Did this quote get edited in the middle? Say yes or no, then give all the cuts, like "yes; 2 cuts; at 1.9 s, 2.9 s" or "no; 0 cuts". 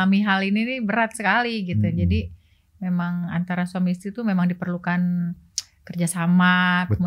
no; 0 cuts